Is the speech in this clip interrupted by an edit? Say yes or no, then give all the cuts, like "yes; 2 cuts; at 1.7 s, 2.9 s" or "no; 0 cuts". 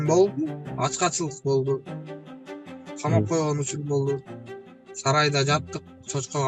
no; 0 cuts